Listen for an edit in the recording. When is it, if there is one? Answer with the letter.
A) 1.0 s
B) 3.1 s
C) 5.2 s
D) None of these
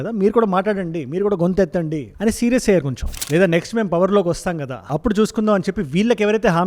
B